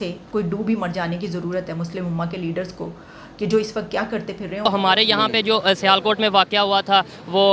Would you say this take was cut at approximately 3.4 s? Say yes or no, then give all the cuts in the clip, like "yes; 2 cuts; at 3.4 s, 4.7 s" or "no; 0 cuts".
no; 1 cut; at 4.9 s